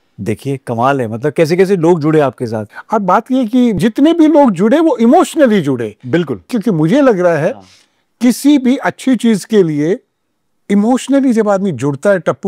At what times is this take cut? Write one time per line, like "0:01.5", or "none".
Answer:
0:02.6
0:03.8
0:06.5